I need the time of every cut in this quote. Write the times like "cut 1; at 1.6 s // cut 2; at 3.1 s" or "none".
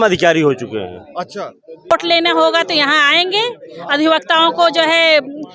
cut 1; at 1.9 s